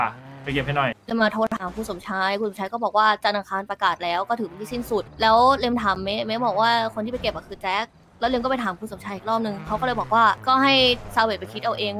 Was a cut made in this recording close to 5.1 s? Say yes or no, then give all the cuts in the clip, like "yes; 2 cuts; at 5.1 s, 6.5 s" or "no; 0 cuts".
yes; 3 cuts; at 1.0 s, 5.1 s, 10.4 s